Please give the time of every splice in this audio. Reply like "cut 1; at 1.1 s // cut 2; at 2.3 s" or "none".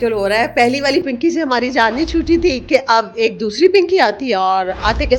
none

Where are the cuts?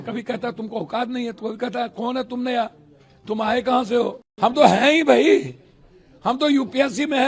cut 1; at 4.2 s

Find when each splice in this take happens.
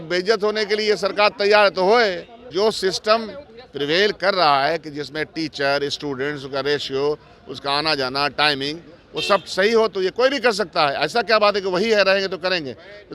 cut 1; at 2.3 s

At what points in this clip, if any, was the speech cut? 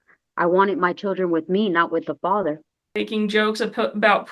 cut 1; at 3.0 s

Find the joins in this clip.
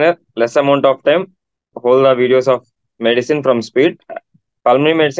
cut 1; at 1.7 s // cut 2; at 4.0 s

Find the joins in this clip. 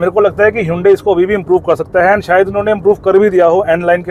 none

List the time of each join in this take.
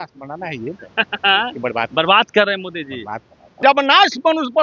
cut 1; at 1.9 s // cut 2; at 3.4 s

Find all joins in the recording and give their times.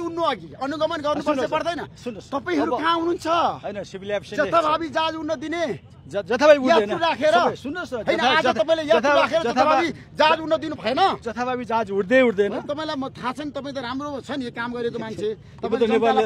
none

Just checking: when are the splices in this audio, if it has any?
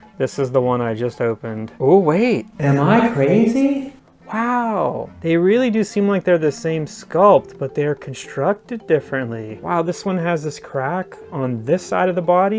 cut 1; at 1.7 s

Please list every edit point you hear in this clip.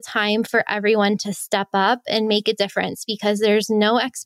none

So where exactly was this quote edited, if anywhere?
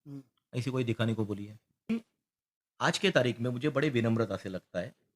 cut 1; at 1.9 s

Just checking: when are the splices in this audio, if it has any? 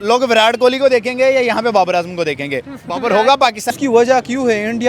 cut 1; at 3.8 s

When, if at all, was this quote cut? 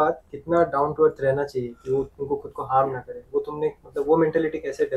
none

